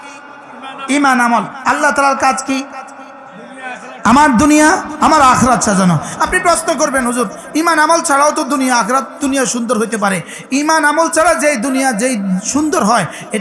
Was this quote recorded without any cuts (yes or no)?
yes